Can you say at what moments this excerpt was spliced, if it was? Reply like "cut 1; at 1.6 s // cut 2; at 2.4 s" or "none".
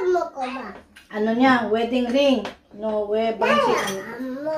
none